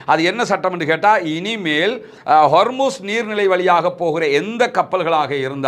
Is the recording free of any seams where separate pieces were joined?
yes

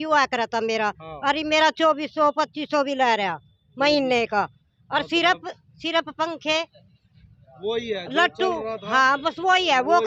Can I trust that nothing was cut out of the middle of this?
yes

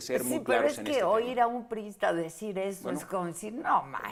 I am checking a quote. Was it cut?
no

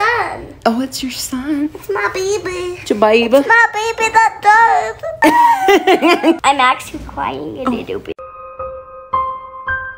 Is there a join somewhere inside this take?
yes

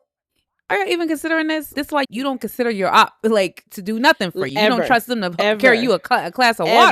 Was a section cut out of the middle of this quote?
yes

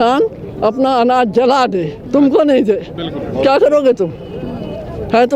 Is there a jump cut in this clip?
no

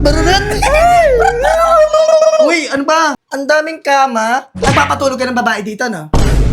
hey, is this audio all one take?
no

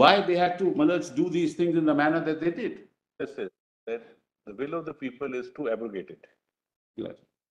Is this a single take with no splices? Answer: no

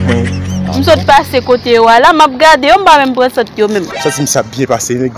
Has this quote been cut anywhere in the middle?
yes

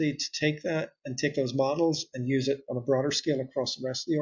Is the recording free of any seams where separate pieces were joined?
yes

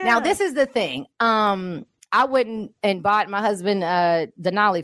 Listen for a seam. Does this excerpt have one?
no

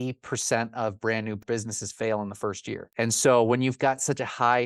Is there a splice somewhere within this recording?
yes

